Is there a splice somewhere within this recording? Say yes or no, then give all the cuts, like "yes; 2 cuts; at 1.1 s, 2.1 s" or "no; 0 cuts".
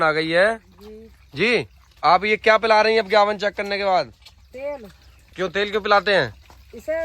yes; 1 cut; at 1.8 s